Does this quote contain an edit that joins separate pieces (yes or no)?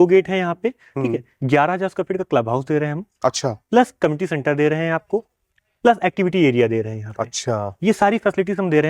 no